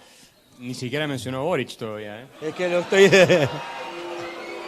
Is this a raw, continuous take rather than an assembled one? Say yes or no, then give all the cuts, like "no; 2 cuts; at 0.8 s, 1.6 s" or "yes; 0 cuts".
yes; 0 cuts